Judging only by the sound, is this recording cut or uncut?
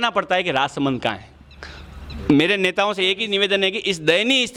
uncut